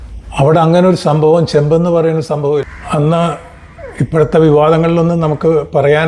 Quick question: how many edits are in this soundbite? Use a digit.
1